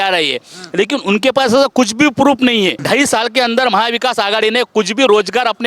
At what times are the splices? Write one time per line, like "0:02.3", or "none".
0:02.8